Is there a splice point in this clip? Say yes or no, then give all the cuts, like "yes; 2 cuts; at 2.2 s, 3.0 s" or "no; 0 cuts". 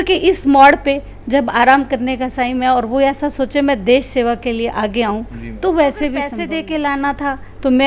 yes; 1 cut; at 6.3 s